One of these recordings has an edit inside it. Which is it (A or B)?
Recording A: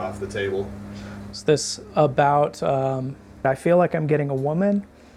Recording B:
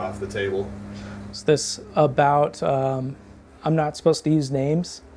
A